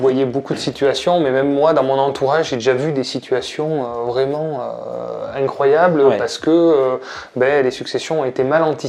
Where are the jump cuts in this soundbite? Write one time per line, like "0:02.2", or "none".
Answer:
none